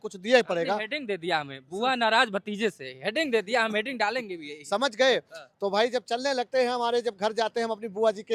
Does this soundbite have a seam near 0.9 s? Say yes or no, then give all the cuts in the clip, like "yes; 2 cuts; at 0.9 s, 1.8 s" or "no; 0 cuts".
no; 0 cuts